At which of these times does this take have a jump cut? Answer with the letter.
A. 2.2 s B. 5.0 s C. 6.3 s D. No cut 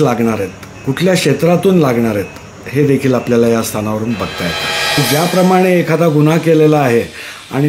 B